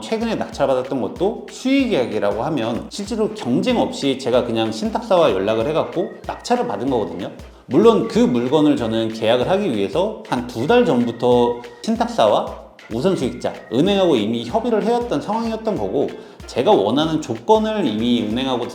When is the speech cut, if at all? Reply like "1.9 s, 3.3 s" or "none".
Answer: none